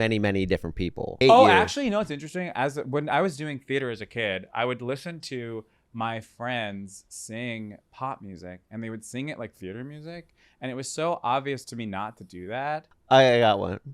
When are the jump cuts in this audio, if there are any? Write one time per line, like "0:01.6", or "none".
0:01.1
0:12.9